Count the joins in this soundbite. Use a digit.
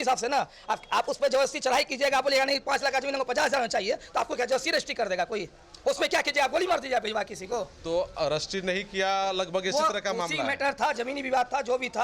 0